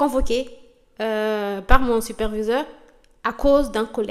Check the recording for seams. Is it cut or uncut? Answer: uncut